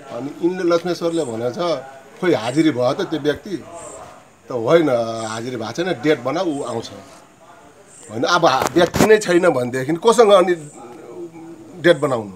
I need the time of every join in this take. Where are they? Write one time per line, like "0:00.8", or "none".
none